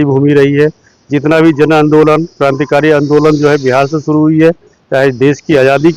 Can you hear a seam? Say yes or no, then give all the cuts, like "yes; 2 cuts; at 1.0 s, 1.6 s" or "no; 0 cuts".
no; 0 cuts